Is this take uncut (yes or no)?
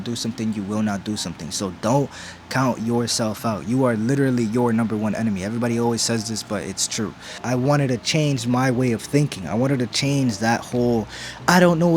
no